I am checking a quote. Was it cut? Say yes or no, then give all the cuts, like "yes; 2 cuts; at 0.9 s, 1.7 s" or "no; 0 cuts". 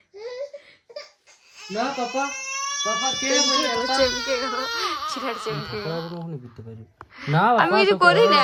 no; 0 cuts